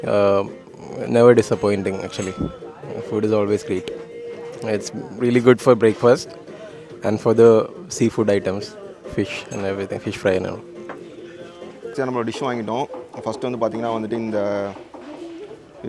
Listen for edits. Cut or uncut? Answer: uncut